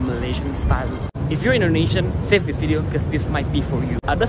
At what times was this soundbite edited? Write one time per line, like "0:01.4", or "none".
none